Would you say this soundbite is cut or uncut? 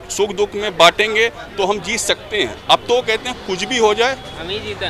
uncut